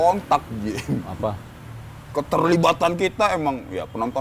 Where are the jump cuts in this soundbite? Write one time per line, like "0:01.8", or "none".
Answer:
none